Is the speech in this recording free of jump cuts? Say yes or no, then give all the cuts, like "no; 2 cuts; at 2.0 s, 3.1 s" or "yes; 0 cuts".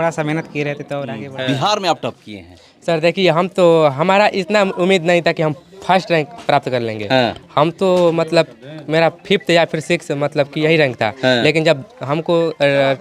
no; 1 cut; at 1.2 s